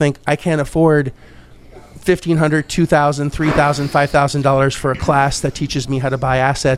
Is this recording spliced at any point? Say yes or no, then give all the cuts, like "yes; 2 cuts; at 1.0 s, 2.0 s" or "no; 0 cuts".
no; 0 cuts